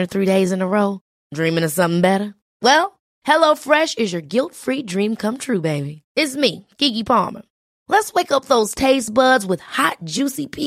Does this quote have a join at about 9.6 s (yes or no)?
no